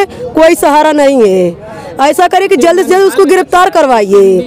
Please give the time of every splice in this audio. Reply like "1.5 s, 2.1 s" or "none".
none